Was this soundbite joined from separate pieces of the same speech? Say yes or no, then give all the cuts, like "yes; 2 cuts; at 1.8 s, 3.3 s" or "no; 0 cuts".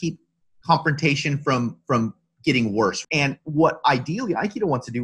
yes; 1 cut; at 3.0 s